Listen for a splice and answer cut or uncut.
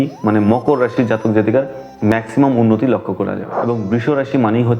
cut